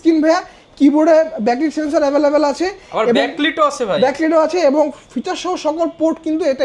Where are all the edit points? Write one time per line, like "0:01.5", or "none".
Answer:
none